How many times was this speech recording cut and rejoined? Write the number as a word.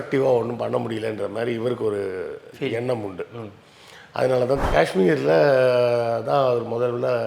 two